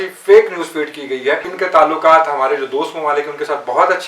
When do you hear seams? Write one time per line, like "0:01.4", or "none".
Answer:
0:01.5

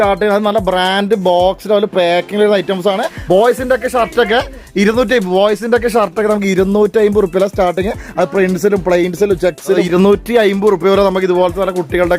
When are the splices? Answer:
0:03.1
0:09.8

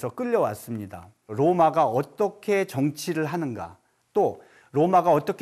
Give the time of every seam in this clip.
0:01.3

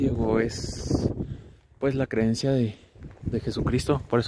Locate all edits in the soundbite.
none

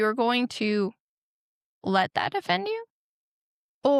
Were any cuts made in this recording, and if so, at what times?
none

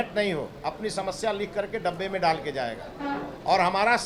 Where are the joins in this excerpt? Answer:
none

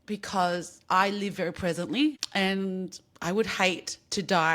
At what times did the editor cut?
0:02.2

